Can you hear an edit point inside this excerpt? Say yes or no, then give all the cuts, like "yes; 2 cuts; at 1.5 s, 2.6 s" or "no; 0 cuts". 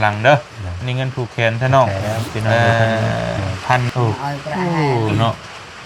yes; 1 cut; at 3.9 s